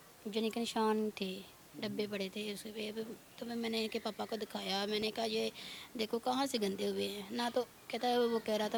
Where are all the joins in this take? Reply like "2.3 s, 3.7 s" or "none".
none